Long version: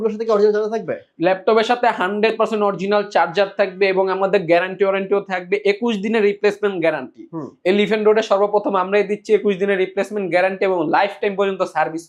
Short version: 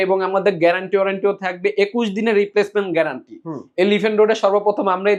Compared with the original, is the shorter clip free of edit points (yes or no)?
yes